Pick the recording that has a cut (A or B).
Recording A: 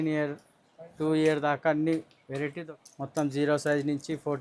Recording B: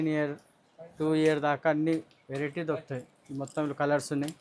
A